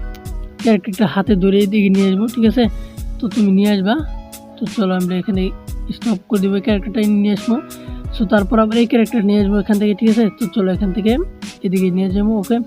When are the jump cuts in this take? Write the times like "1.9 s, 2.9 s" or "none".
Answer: none